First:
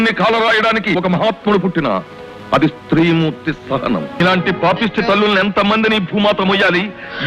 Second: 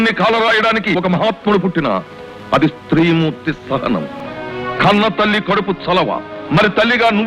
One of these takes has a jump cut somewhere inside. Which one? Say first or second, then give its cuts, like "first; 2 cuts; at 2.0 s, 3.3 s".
first; 1 cut; at 4.2 s